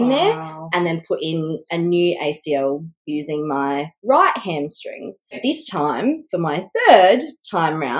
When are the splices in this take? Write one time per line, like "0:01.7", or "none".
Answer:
0:05.4